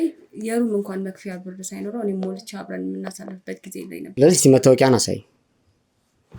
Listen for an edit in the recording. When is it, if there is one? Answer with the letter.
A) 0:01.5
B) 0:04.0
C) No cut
B